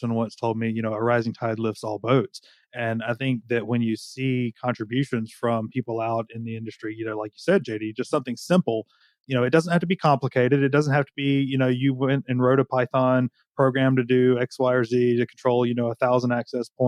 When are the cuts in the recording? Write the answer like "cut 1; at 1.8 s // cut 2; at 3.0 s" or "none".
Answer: none